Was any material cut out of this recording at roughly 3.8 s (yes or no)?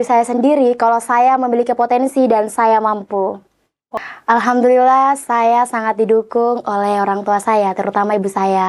yes